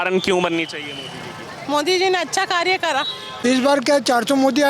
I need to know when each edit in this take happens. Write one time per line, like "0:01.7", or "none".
0:03.3